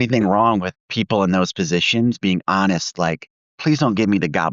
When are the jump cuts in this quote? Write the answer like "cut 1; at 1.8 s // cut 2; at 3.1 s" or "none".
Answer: none